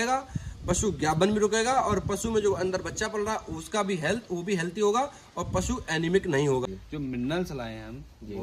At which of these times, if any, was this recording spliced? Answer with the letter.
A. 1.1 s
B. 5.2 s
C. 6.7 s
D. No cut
C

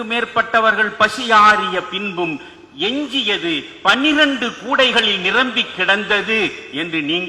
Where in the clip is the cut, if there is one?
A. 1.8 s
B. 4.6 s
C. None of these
C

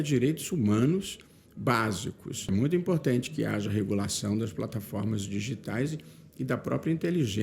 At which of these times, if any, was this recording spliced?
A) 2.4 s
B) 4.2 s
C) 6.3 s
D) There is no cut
A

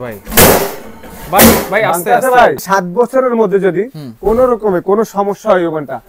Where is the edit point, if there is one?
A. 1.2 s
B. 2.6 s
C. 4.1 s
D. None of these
B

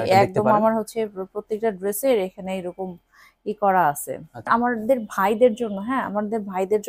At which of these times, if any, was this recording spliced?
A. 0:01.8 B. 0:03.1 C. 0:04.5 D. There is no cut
C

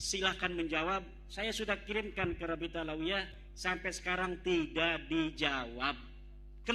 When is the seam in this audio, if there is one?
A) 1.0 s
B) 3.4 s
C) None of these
B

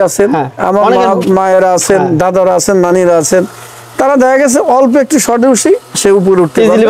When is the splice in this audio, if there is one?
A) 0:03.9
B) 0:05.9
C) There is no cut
C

